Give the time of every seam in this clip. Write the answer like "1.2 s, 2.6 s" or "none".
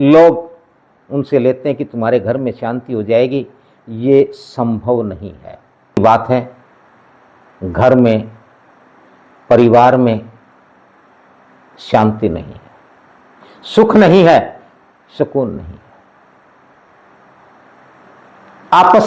6.0 s